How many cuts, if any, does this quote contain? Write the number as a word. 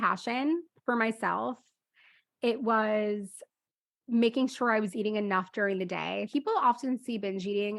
one